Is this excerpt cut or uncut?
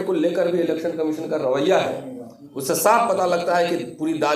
uncut